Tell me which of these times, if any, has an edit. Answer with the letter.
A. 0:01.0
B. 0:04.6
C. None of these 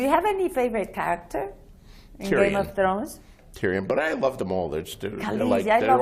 C